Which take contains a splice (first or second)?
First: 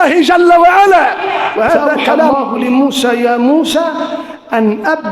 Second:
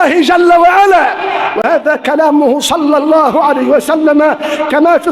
first